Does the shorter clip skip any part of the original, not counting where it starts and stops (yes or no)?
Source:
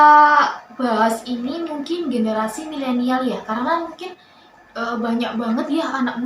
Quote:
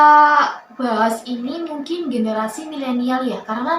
no